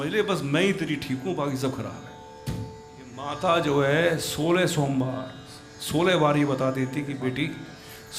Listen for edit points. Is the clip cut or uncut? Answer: cut